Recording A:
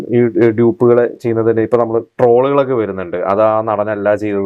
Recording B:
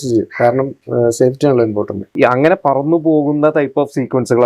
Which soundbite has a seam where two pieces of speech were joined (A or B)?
B